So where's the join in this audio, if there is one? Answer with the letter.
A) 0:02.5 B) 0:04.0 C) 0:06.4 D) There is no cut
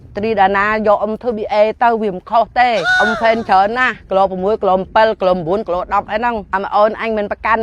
C